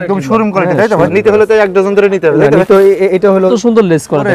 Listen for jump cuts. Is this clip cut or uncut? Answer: cut